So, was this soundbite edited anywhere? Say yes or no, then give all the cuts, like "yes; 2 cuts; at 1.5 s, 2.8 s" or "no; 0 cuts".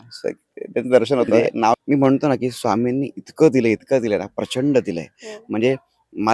yes; 1 cut; at 1.7 s